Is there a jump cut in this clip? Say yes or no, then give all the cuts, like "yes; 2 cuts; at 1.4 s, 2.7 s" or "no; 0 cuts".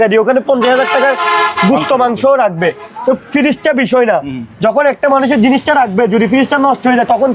no; 0 cuts